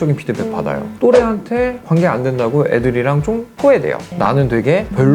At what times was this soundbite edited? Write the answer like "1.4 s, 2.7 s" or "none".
4.1 s